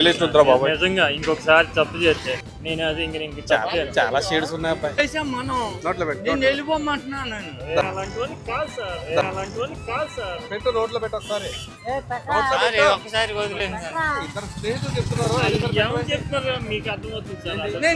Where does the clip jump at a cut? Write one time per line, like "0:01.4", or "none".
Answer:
none